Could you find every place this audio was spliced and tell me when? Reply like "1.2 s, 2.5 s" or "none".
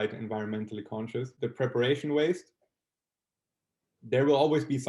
1.3 s